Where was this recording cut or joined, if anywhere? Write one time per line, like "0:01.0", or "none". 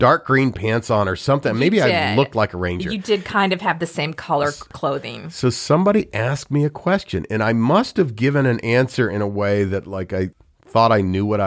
none